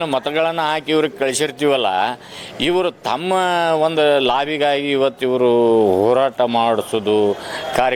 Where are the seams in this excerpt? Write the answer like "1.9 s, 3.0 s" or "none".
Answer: none